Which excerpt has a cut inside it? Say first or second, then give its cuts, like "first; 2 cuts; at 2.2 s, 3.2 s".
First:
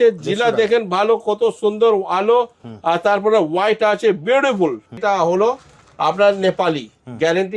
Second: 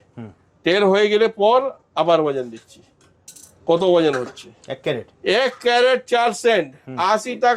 first; 1 cut; at 4.9 s